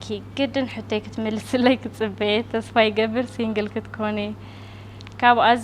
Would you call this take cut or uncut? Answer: uncut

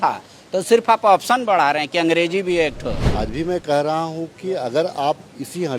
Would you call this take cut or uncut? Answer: cut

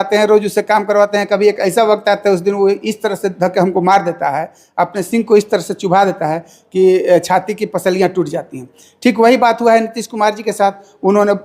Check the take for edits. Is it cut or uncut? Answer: uncut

